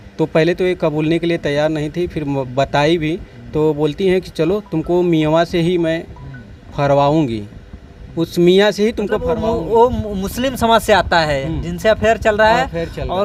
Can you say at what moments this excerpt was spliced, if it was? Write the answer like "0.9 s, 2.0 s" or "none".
none